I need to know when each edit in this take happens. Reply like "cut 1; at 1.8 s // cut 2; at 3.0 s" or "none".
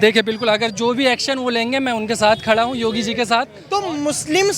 cut 1; at 3.6 s